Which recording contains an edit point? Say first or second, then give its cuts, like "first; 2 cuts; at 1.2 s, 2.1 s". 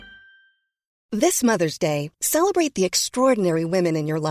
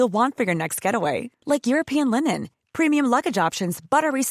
first; 1 cut; at 0.9 s